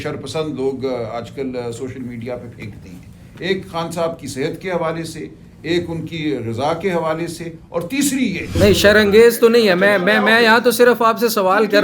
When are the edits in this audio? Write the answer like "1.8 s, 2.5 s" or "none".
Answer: 8.5 s